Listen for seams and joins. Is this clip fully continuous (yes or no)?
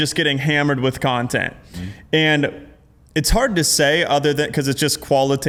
yes